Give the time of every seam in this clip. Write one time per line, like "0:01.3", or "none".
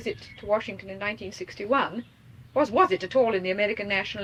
none